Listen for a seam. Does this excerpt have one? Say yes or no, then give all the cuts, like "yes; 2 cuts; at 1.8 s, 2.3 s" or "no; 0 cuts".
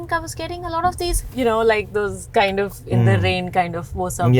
yes; 1 cut; at 1.3 s